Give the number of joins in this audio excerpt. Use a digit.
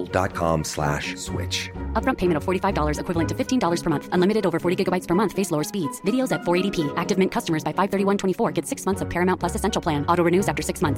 0